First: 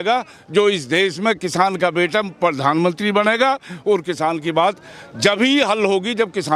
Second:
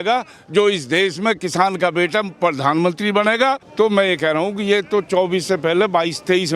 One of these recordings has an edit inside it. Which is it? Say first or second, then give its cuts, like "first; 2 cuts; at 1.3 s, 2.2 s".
second; 1 cut; at 3.6 s